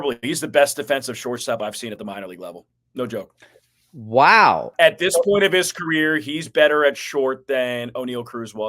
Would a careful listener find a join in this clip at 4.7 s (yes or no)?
yes